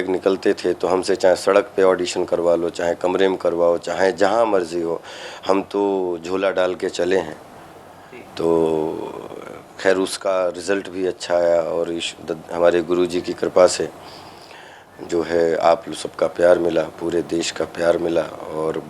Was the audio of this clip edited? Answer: no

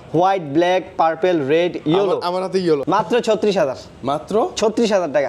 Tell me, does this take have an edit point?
yes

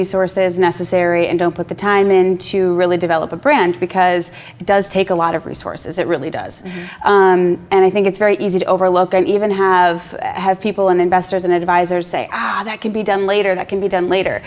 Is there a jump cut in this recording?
no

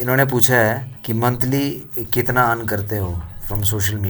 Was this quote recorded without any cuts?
no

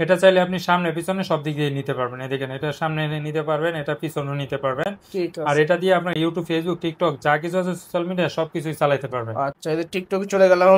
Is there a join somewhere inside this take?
no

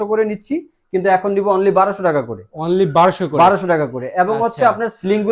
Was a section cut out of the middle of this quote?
no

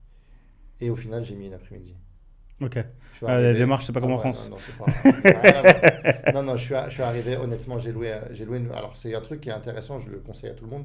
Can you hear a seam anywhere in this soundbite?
no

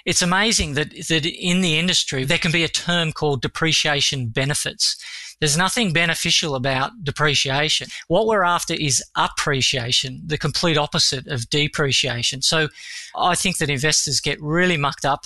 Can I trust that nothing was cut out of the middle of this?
no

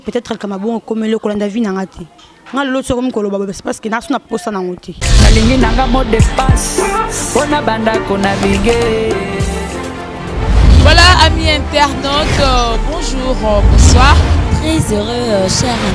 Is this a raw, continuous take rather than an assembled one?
no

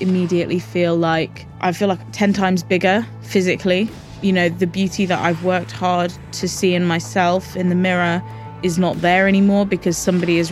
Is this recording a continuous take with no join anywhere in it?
no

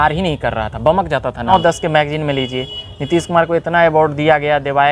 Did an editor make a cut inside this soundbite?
yes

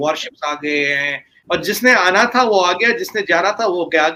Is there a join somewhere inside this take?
no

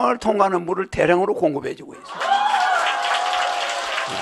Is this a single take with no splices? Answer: yes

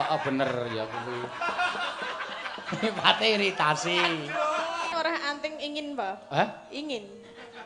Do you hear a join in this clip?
yes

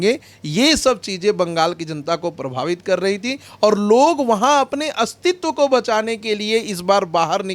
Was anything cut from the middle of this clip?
no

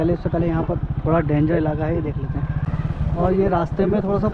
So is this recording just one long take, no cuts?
no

